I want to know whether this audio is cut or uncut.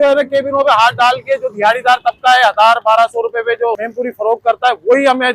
cut